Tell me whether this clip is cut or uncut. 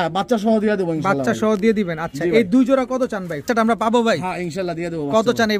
cut